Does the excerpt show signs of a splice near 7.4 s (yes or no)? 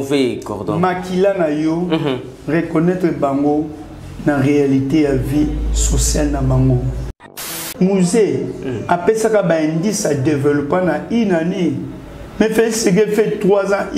yes